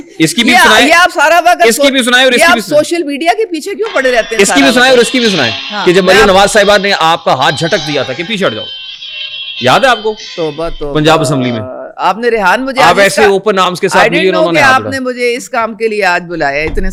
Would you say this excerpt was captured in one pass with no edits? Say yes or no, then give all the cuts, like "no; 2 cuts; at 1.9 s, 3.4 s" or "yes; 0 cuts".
yes; 0 cuts